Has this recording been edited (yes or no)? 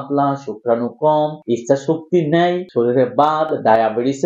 no